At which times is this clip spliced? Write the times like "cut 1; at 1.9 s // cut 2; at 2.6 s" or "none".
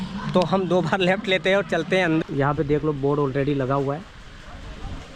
cut 1; at 2.2 s